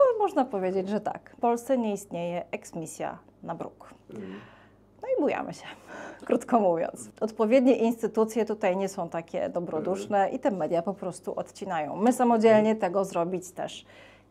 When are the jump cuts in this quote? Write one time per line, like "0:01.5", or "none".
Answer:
0:01.3
0:07.0